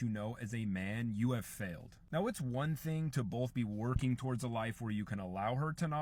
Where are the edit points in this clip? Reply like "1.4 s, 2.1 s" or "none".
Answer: none